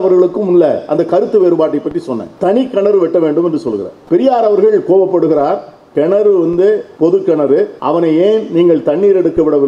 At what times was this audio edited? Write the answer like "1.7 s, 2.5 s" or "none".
2.2 s, 3.9 s, 5.8 s, 6.9 s, 7.8 s